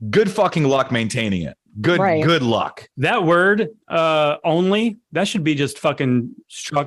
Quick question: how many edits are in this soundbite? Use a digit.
0